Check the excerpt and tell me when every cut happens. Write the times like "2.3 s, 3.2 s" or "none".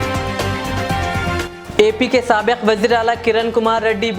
none